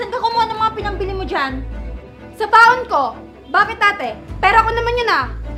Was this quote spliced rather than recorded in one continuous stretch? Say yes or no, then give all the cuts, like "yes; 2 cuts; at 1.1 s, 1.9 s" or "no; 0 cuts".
no; 0 cuts